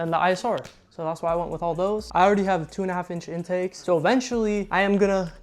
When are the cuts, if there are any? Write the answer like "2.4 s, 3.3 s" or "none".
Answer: 2.1 s, 3.8 s, 4.7 s